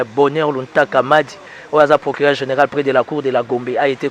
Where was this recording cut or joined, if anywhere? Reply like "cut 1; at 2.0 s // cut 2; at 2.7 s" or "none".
none

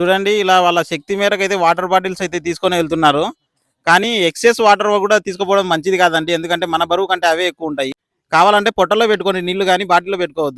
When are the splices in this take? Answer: cut 1; at 8.0 s

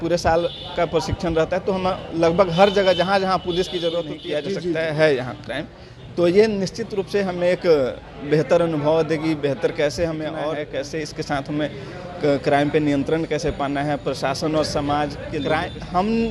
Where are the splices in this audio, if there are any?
cut 1; at 4.2 s // cut 2; at 10.4 s // cut 3; at 15.3 s

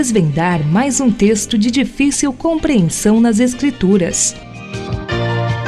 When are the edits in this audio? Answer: cut 1; at 4.3 s

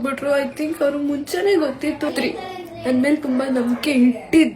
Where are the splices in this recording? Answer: cut 1; at 2.1 s

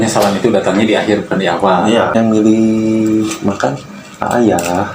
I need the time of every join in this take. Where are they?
cut 1; at 2.1 s

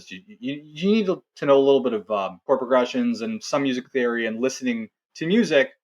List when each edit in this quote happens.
cut 1; at 2.4 s

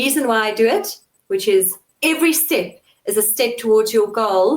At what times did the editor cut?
cut 1; at 1.8 s

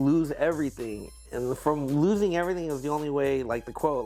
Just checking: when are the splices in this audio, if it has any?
none

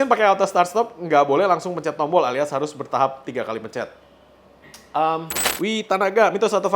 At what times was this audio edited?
cut 1; at 5.4 s

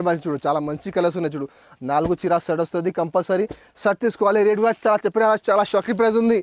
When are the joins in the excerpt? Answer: none

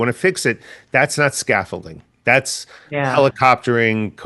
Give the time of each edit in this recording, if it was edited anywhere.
none

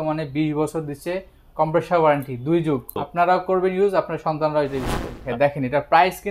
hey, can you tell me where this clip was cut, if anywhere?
cut 1; at 3.0 s // cut 2; at 5.3 s

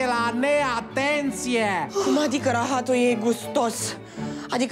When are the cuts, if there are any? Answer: cut 1; at 1.9 s

